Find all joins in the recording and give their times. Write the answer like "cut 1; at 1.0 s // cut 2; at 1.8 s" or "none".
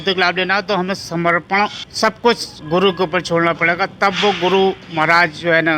cut 1; at 1.8 s